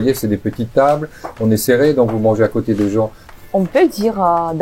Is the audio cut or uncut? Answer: cut